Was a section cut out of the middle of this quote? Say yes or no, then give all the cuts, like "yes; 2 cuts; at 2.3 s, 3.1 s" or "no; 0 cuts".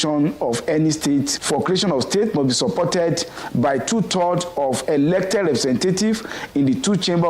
yes; 1 cut; at 1.3 s